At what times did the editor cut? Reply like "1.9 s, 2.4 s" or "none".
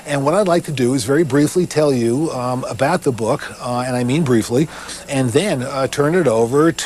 none